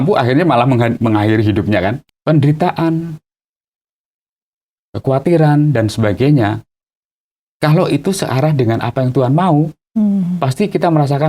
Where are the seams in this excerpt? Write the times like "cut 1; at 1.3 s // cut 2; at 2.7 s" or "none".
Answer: cut 1; at 2.0 s